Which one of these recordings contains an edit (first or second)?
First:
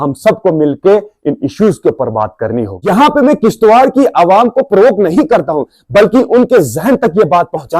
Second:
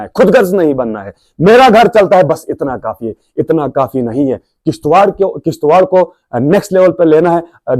first